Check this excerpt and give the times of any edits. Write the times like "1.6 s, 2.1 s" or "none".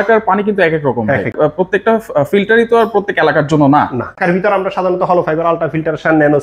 1.3 s, 4.2 s